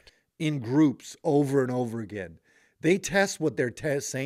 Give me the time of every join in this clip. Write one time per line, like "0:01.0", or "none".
none